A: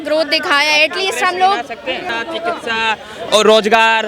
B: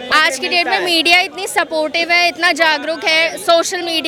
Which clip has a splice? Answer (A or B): A